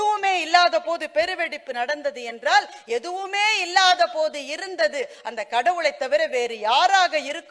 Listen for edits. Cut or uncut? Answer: uncut